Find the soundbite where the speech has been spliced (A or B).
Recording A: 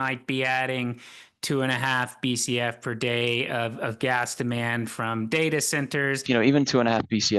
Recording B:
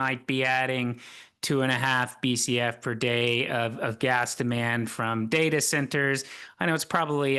A